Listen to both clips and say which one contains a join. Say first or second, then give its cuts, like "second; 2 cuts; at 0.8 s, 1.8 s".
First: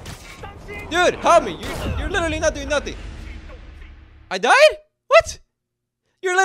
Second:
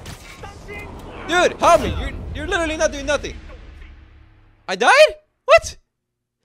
first; 1 cut; at 0.9 s